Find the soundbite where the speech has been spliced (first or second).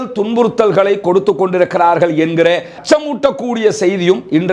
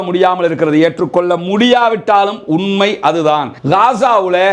second